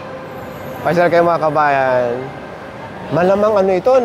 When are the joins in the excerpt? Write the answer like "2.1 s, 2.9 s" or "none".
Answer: 2.9 s